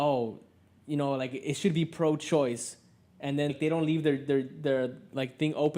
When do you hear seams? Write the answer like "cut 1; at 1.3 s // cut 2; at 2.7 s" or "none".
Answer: cut 1; at 3.5 s